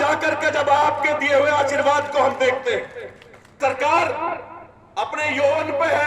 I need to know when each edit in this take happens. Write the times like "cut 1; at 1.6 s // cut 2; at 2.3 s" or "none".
cut 1; at 3.6 s